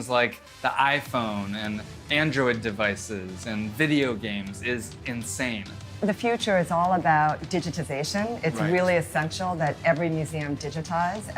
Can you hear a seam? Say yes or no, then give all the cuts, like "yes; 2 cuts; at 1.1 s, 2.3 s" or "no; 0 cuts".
yes; 1 cut; at 6.0 s